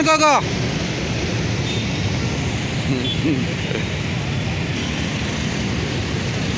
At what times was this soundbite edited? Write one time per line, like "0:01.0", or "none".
none